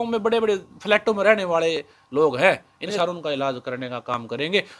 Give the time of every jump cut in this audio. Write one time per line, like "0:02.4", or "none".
0:02.9